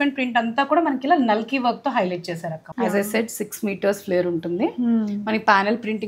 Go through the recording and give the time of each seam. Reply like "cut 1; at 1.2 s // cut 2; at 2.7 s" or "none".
cut 1; at 2.6 s